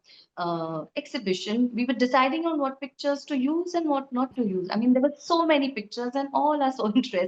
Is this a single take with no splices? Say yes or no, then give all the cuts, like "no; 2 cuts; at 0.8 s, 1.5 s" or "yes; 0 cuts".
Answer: yes; 0 cuts